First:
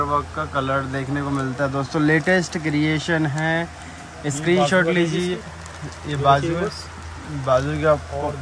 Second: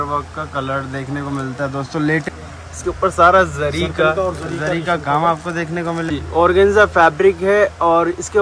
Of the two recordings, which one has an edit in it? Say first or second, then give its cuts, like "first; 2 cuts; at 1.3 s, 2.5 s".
second; 2 cuts; at 2.3 s, 6.1 s